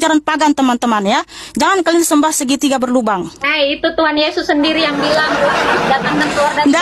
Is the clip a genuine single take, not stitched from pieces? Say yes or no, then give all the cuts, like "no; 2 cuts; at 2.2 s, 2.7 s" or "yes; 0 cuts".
no; 1 cut; at 3.4 s